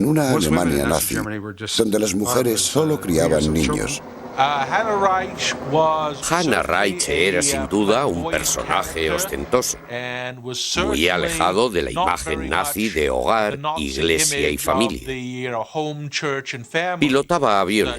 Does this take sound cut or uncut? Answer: cut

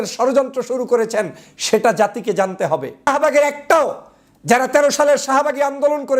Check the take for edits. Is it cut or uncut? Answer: cut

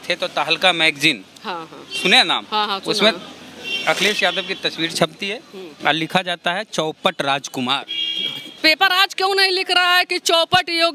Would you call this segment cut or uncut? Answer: cut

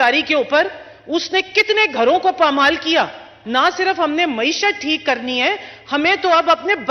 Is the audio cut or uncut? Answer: cut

